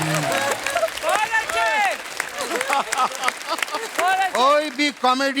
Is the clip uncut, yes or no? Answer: yes